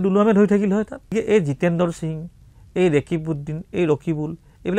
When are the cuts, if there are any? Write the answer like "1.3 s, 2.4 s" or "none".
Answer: 1.1 s